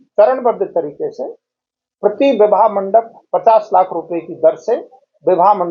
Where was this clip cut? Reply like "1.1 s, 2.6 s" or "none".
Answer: none